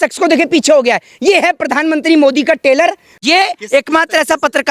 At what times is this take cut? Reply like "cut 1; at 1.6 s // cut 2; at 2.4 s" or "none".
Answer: cut 1; at 3.2 s